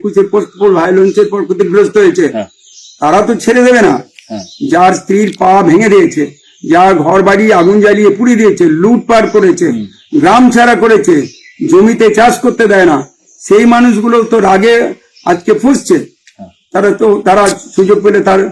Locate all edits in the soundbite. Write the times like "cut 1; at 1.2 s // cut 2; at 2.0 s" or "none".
none